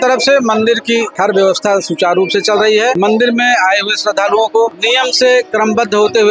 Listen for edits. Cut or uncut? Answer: cut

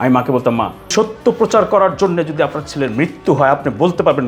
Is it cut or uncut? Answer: cut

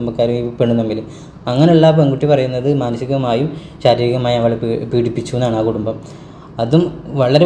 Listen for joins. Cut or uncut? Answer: uncut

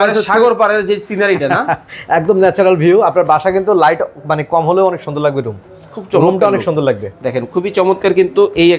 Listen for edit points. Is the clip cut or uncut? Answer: uncut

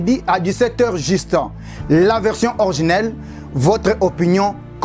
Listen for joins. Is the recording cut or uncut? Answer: uncut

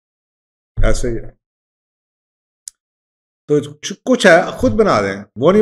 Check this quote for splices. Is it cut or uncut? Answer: uncut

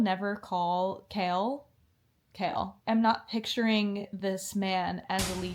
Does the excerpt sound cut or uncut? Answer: uncut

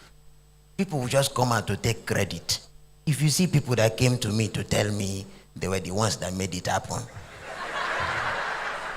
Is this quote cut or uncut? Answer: cut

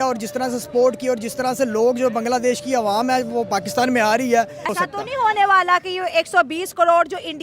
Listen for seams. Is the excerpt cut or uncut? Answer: cut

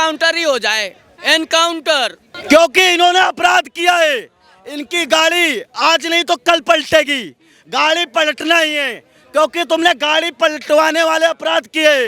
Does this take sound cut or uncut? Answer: cut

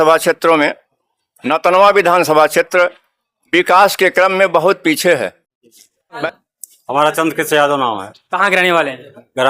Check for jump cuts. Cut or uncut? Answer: cut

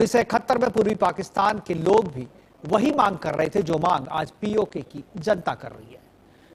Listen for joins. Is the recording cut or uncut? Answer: uncut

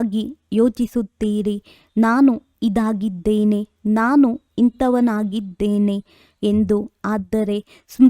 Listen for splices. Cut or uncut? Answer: cut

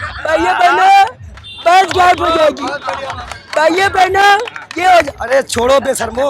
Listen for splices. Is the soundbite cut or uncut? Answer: uncut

